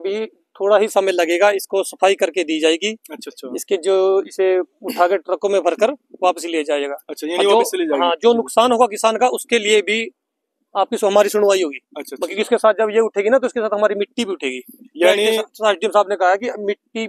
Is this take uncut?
yes; 0 cuts

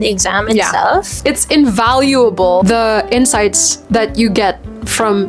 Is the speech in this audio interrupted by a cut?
yes; 2 cuts; at 1.1 s, 2.6 s

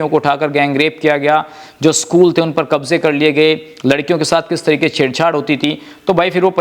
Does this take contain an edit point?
no; 0 cuts

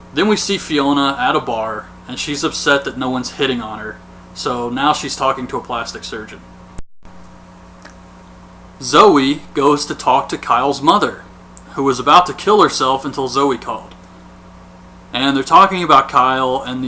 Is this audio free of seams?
yes; 0 cuts

